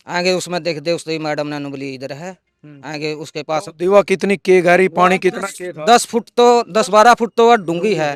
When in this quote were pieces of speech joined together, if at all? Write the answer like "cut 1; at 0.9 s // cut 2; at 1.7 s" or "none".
none

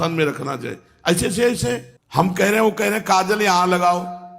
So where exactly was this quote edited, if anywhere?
cut 1; at 1.9 s

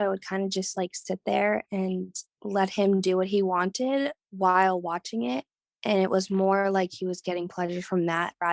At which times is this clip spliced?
cut 1; at 4.2 s

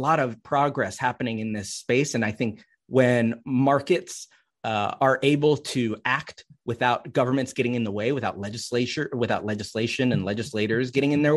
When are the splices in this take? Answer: none

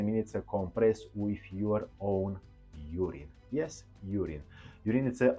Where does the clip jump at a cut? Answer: none

